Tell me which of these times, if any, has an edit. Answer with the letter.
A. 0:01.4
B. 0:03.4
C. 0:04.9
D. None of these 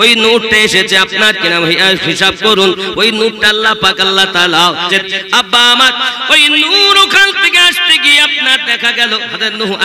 C